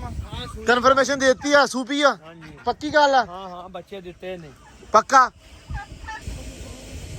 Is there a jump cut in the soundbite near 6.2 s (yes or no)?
yes